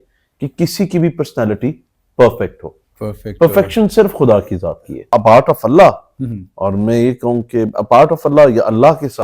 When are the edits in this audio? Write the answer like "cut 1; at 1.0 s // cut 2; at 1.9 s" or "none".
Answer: cut 1; at 4.9 s